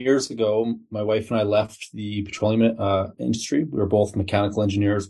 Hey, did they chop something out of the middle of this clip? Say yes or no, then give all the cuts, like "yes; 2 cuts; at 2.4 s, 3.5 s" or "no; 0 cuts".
no; 0 cuts